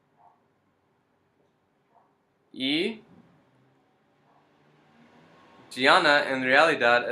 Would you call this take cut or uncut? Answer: cut